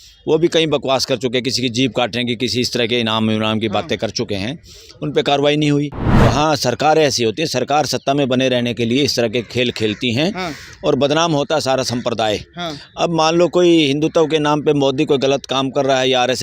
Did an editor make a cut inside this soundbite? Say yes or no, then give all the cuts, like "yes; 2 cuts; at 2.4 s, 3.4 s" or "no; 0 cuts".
yes; 1 cut; at 6.0 s